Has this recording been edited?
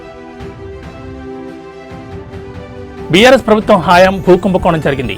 no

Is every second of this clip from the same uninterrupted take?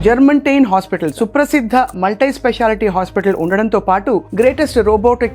no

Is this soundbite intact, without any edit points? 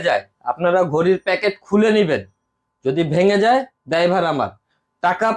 yes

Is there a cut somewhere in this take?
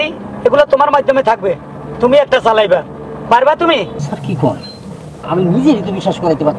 no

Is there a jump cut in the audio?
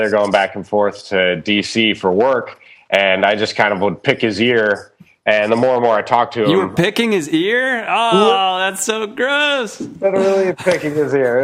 no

